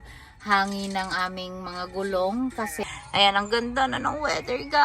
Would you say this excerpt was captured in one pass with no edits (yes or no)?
no